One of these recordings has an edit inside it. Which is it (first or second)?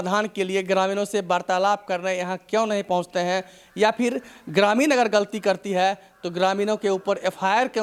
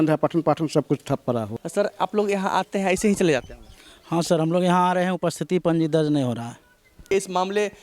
second